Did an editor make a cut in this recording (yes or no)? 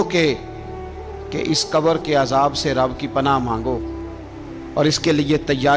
no